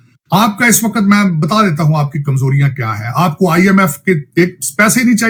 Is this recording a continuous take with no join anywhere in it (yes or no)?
yes